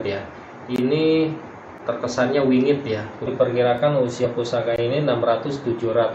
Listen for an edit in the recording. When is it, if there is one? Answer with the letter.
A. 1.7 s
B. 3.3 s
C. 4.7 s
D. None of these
B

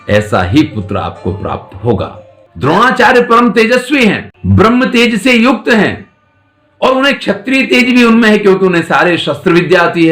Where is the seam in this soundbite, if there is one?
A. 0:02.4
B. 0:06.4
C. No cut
A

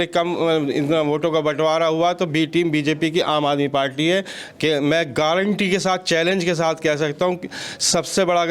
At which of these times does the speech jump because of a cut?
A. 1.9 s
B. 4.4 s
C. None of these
C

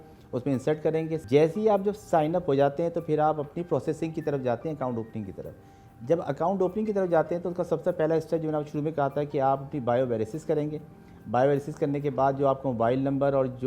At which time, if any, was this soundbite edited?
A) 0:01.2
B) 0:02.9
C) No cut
A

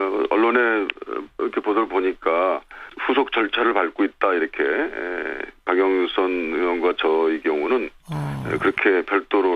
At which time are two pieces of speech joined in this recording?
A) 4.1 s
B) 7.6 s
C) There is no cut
B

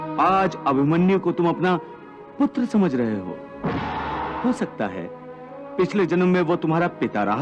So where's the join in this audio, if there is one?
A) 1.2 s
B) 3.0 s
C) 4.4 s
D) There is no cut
C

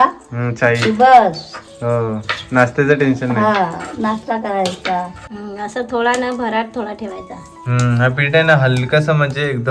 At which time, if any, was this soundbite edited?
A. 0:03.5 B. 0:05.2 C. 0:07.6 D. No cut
B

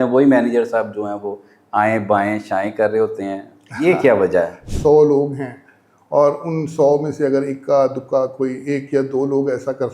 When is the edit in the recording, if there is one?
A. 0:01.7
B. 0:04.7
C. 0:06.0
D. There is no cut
B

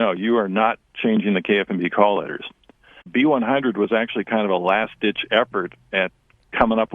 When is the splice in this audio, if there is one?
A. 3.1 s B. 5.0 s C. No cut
A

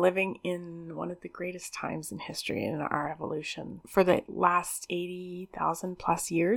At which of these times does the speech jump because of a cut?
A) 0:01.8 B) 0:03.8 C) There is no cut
B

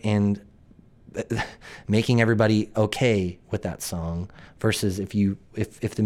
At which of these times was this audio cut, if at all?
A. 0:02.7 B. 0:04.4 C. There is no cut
A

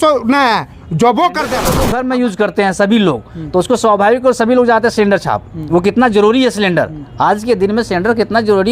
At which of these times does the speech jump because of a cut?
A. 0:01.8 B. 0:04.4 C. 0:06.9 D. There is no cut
A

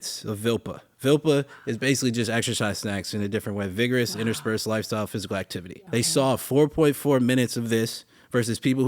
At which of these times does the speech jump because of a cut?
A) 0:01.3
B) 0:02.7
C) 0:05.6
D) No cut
C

